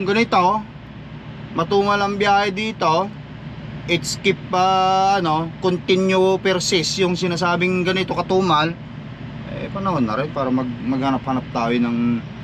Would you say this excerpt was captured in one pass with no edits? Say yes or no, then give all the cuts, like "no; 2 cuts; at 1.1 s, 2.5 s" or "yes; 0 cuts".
yes; 0 cuts